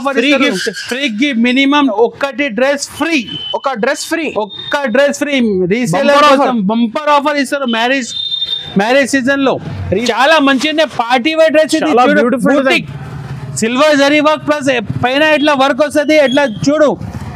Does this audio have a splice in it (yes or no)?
yes